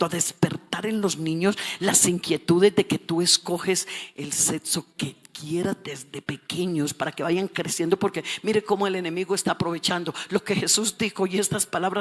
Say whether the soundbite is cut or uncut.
uncut